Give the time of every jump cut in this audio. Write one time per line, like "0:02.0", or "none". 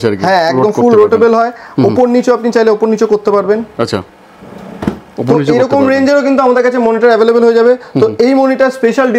none